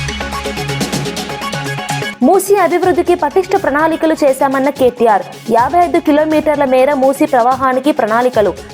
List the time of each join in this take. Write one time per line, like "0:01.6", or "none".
0:02.1